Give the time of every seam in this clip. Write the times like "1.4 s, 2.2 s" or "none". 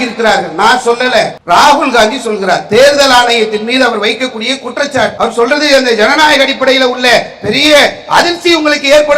1.4 s, 5.1 s

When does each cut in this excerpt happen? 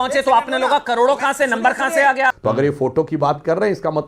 2.4 s

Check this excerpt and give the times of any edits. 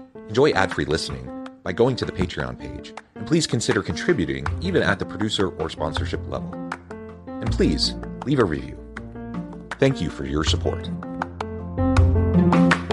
none

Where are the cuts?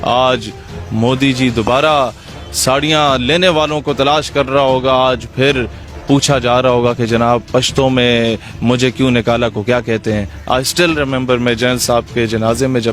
10.3 s

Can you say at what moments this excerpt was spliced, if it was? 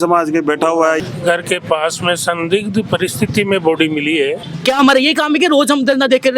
1.0 s, 4.5 s

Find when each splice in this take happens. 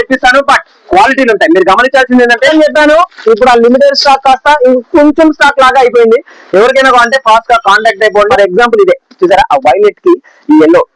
2.5 s, 8.3 s

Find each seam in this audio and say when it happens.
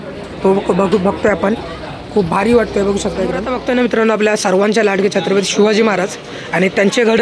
3.5 s

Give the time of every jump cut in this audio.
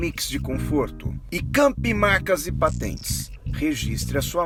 none

